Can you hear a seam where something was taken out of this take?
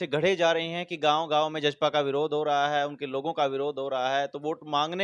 no; 0 cuts

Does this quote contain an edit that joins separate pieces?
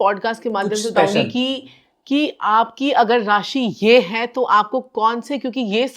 no; 0 cuts

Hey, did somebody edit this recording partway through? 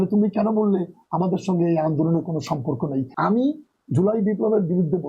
yes; 1 cut; at 3.1 s

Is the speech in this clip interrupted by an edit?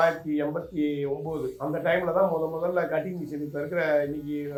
no; 0 cuts

